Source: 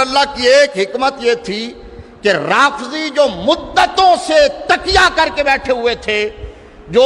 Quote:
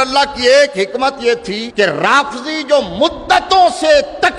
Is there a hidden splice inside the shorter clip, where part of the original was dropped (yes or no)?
yes